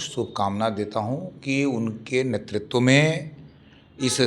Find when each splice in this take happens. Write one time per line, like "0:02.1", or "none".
none